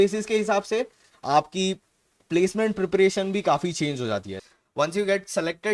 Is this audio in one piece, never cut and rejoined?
no; 1 cut; at 4.3 s

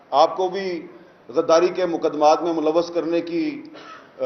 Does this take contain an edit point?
no; 0 cuts

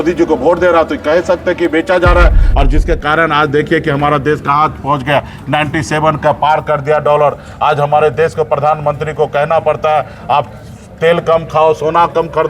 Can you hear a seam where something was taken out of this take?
yes; 1 cut; at 2.4 s

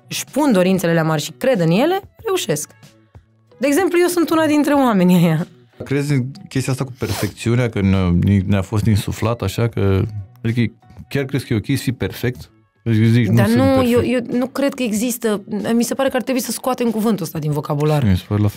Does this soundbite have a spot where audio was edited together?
yes; 1 cut; at 5.8 s

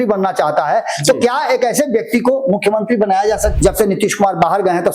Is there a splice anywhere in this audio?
yes; 1 cut; at 3.5 s

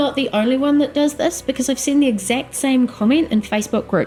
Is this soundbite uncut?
yes; 0 cuts

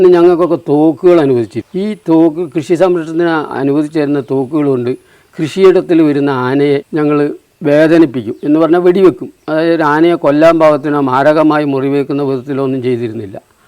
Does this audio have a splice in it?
yes; 2 cuts; at 1.6 s, 6.9 s

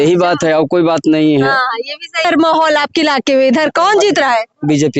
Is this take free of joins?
no; 1 cut; at 2.2 s

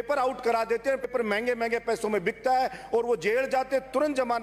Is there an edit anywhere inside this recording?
yes; 1 cut; at 1.1 s

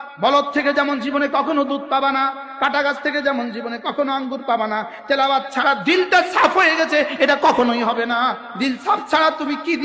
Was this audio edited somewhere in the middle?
yes; 1 cut; at 8.5 s

